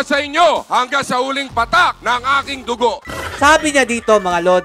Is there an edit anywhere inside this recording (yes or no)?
yes